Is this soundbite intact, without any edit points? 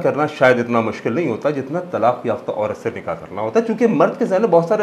yes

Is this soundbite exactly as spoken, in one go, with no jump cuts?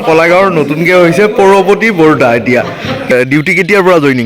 no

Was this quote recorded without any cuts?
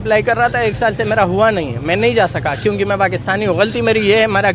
yes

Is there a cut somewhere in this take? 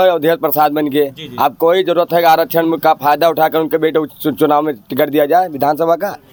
no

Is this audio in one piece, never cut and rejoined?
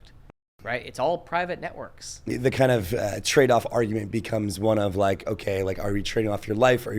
no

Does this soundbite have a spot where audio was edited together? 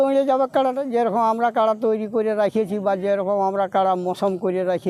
no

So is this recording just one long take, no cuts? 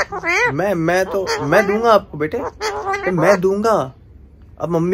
yes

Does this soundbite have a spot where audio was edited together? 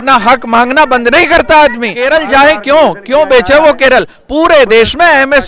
yes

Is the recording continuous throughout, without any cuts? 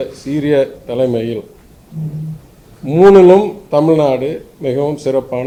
yes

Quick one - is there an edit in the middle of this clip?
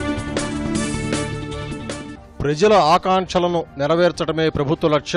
no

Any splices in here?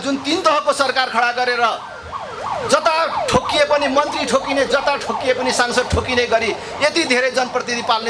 no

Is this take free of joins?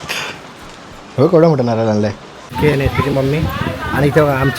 no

